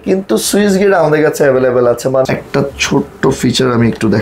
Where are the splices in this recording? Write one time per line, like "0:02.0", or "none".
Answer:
0:02.2